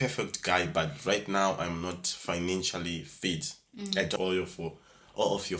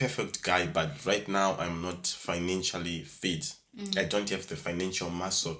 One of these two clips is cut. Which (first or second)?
first